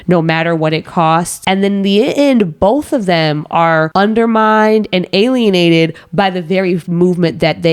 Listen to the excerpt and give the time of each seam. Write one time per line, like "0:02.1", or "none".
0:01.3
0:03.9